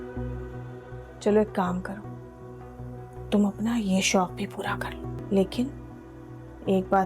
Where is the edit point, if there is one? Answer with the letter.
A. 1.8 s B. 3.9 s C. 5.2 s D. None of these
C